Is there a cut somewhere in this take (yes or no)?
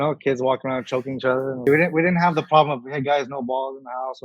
yes